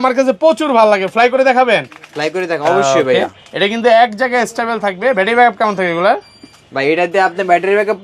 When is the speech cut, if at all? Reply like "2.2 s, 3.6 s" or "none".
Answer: none